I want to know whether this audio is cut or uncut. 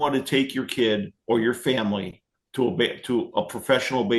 uncut